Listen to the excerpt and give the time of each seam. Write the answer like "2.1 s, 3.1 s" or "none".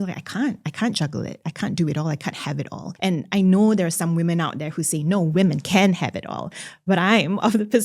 2.8 s